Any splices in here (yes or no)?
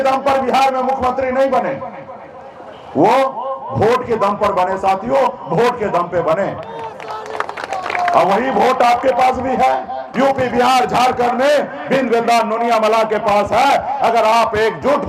yes